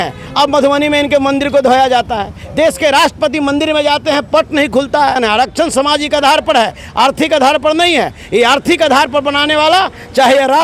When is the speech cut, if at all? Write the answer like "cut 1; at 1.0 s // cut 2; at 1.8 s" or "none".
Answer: cut 1; at 5.2 s